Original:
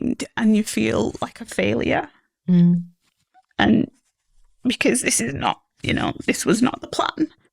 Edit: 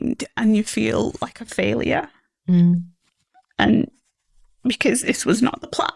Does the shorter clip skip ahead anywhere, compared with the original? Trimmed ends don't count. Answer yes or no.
yes